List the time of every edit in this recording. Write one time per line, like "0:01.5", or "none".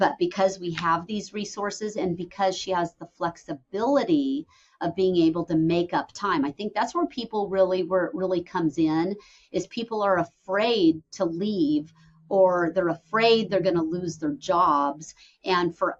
none